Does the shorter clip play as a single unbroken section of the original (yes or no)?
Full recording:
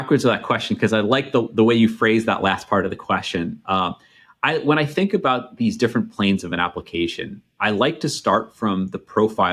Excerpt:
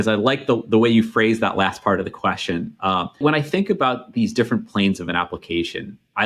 no